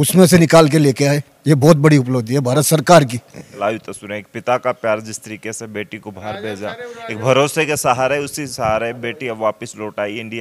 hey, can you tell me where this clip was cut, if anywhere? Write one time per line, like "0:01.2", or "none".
none

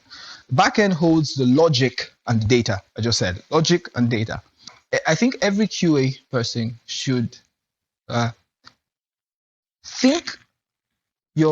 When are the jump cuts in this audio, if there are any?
0:04.7

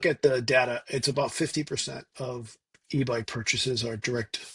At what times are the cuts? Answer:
none

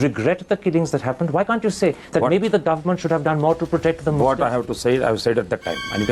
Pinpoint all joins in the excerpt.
none

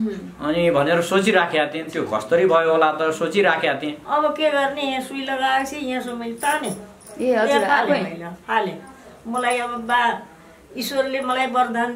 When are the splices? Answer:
0:04.0

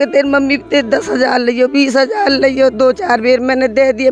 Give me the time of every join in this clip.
none

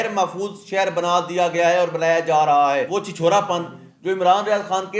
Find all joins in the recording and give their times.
0:02.9

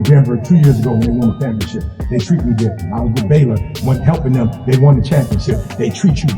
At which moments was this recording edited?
none

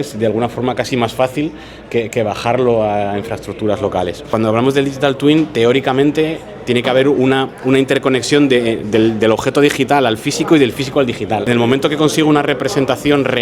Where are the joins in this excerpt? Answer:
0:04.2
0:11.4

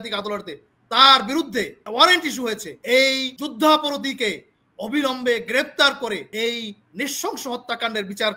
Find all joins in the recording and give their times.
0:01.8
0:02.7
0:03.4
0:06.3

